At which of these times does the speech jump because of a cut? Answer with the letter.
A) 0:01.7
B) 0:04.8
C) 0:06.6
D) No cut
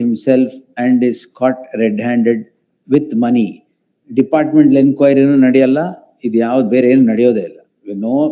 D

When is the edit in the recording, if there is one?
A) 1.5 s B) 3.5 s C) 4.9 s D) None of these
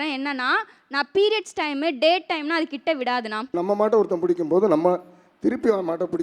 B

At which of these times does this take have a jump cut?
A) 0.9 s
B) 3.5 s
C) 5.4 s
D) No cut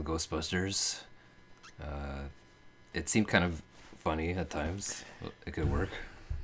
A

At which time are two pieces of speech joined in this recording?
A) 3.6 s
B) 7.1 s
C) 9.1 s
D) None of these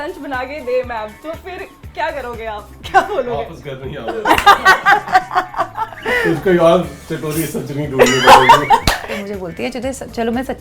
C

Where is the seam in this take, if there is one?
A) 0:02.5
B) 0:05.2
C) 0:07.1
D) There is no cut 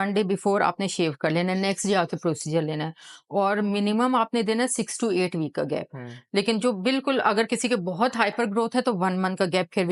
D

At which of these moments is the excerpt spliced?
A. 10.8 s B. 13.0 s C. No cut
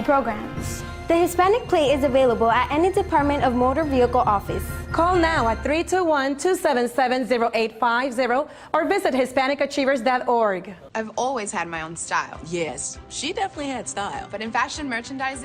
A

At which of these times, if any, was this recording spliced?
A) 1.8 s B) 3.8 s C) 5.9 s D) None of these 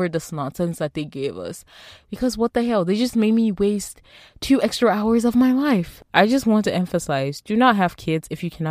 C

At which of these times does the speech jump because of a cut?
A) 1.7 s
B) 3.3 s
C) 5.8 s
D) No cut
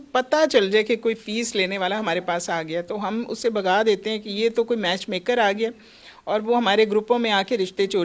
D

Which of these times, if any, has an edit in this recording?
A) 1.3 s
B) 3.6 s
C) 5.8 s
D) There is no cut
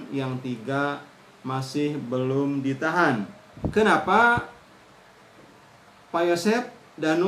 B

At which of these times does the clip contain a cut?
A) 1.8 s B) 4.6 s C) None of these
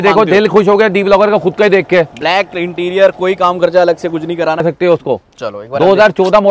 B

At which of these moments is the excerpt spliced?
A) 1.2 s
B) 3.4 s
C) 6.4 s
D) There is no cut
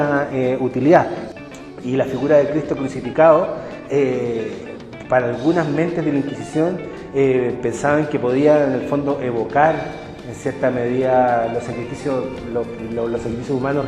A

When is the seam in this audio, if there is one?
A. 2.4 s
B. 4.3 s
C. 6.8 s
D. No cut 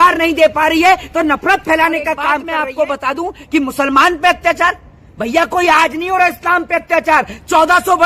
A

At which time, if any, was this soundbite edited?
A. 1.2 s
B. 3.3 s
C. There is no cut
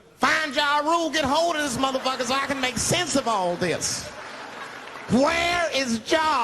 A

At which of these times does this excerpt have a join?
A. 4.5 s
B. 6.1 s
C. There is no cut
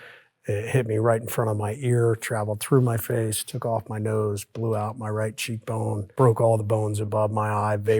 B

